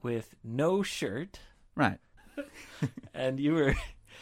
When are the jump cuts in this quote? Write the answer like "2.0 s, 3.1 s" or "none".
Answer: 2.1 s